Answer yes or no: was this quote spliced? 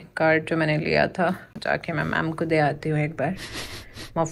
yes